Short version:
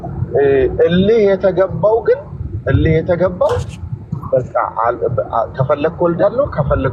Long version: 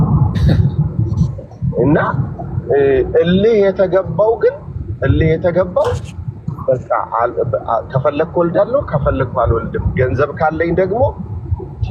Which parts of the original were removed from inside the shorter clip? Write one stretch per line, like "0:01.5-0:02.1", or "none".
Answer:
none